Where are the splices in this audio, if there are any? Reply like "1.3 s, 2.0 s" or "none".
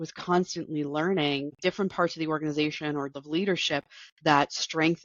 1.6 s, 3.1 s